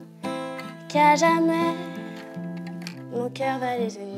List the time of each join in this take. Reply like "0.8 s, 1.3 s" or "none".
2.9 s